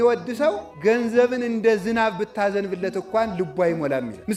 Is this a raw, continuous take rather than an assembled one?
yes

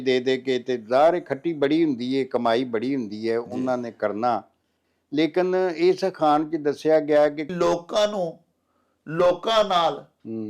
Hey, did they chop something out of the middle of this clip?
yes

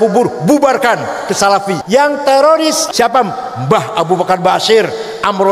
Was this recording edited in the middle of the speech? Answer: yes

